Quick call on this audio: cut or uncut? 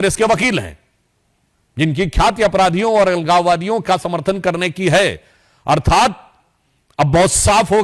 uncut